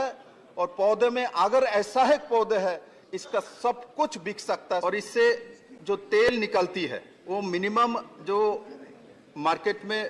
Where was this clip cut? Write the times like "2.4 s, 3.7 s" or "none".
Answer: 4.8 s, 7.1 s